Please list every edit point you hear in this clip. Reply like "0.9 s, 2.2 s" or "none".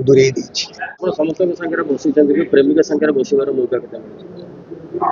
0.9 s